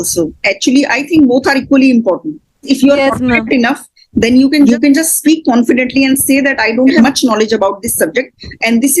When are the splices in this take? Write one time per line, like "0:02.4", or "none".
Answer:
0:07.0